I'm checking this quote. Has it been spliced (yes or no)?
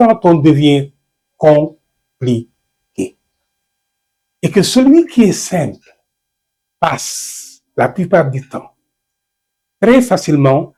no